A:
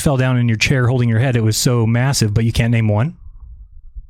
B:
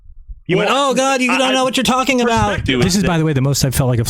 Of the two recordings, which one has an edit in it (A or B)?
B